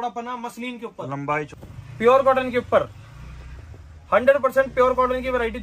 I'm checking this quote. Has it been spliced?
yes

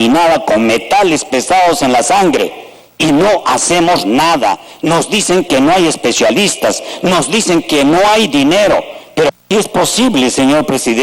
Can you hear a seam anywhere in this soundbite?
yes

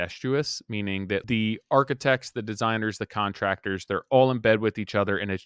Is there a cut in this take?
yes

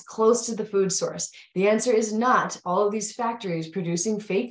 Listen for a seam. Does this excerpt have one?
no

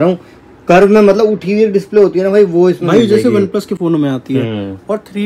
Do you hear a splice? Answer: no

